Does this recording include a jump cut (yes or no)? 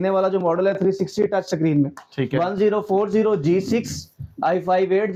no